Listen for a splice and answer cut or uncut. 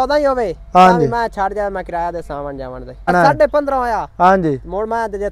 cut